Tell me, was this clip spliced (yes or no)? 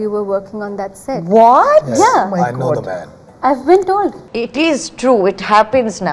yes